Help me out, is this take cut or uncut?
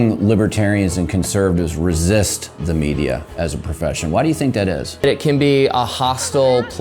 cut